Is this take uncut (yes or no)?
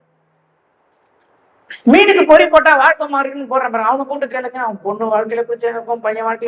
yes